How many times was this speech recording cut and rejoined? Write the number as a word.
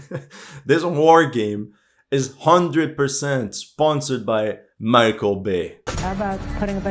one